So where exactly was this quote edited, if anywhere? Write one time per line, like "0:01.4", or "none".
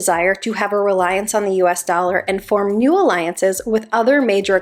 none